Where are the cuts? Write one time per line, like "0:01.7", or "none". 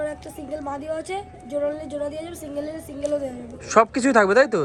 none